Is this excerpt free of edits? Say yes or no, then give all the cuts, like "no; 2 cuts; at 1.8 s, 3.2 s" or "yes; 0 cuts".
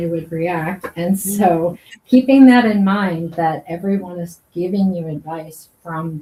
yes; 0 cuts